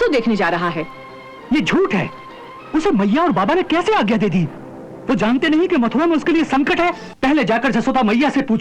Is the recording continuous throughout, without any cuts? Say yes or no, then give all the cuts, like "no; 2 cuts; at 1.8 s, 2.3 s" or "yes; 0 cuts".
no; 1 cut; at 7.1 s